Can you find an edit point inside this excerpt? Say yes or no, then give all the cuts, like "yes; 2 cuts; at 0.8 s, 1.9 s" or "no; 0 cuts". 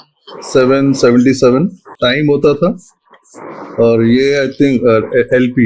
yes; 1 cut; at 1.9 s